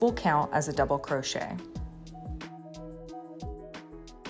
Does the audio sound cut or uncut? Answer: cut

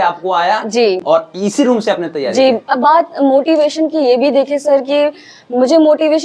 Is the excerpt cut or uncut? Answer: uncut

